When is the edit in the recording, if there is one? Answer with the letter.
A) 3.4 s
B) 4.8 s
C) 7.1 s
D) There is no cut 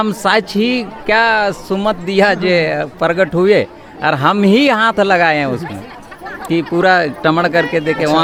D